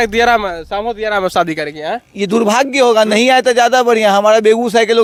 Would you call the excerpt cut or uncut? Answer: uncut